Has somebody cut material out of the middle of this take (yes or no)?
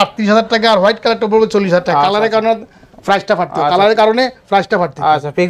no